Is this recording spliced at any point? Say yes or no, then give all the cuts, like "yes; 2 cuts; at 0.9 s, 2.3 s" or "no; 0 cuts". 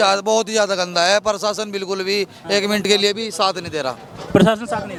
no; 0 cuts